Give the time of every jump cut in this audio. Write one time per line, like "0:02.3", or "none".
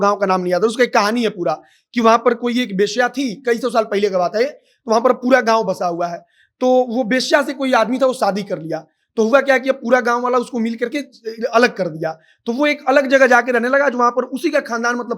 none